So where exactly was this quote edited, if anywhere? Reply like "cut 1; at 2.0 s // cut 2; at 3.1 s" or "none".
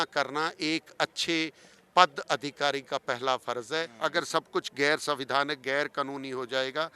cut 1; at 3.9 s